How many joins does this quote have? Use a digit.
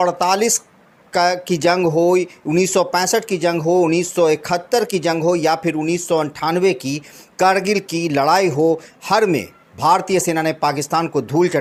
0